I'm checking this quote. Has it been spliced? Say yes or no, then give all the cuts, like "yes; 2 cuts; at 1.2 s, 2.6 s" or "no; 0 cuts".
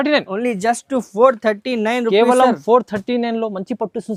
no; 0 cuts